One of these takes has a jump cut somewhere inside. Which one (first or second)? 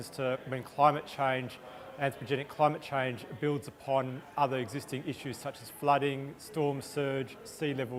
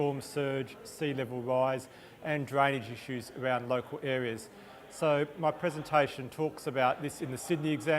second